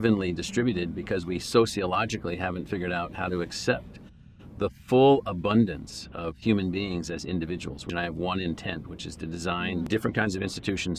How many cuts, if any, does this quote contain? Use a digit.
2